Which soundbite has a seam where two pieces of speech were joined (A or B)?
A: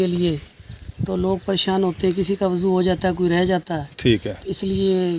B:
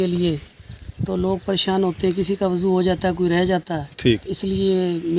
B